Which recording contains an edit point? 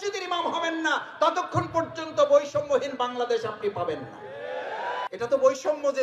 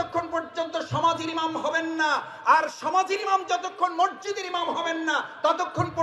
first; 1 cut; at 5.1 s

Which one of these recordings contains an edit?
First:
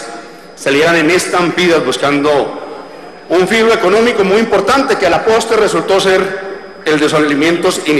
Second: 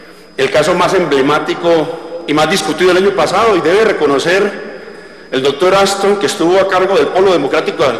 first; 1 cut; at 3.1 s

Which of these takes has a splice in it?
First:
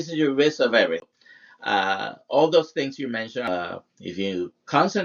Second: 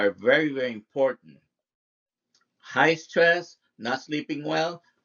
first; 2 cuts; at 1.2 s, 3.5 s

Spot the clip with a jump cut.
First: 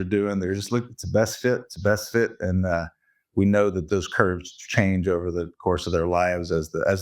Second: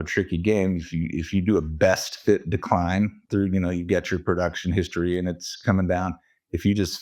first; 1 cut; at 3.8 s

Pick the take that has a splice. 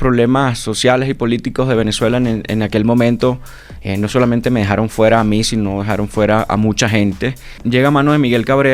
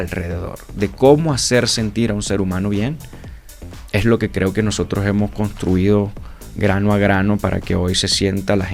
first; 1 cut; at 7.5 s

